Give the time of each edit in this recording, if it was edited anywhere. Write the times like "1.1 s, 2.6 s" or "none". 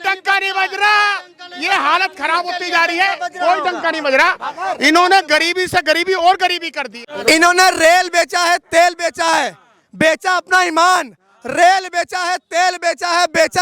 7.1 s